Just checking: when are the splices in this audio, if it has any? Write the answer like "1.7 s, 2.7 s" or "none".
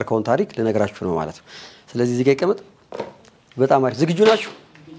none